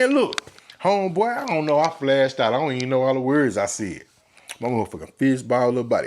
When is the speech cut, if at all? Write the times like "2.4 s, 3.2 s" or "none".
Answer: none

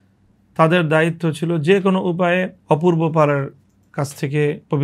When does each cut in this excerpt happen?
2.5 s

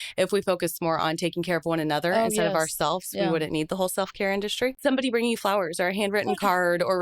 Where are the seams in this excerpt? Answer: 4.8 s

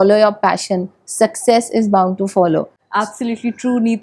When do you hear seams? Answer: none

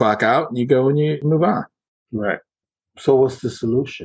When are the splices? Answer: 1.2 s

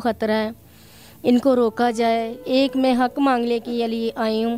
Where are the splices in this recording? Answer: 2.4 s

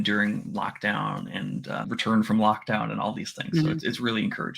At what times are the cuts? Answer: 1.9 s

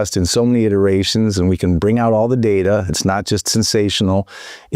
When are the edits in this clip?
none

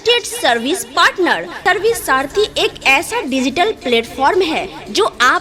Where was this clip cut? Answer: none

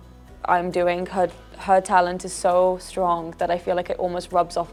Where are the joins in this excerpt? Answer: none

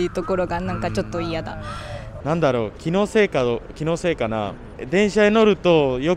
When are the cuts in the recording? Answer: 1.7 s

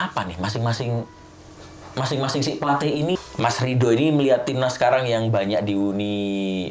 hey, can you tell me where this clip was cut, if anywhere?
3.2 s

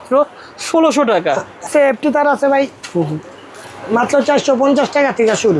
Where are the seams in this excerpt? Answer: 1.7 s

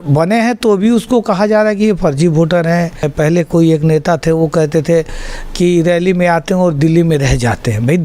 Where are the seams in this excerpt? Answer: 3.1 s

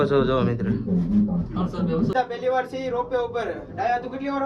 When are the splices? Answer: none

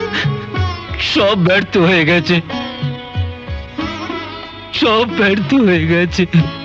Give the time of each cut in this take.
none

